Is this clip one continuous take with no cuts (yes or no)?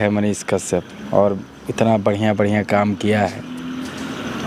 yes